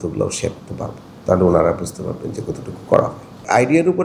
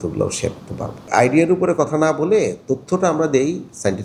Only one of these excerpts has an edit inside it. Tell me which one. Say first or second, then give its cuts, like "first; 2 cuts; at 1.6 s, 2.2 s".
second; 1 cut; at 0.9 s